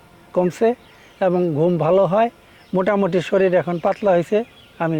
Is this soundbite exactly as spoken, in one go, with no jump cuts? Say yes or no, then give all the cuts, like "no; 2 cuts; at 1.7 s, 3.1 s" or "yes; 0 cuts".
yes; 0 cuts